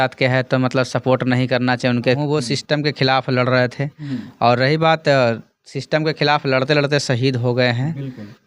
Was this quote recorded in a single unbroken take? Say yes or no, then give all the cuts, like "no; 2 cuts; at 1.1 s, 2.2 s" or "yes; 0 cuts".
no; 1 cut; at 2.2 s